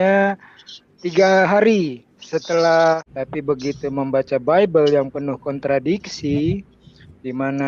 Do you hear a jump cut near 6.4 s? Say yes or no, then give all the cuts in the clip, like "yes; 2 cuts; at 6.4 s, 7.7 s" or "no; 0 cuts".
no; 1 cut; at 3.0 s